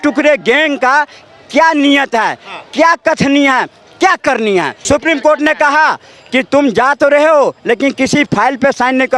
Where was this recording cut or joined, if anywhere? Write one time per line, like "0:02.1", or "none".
0:04.8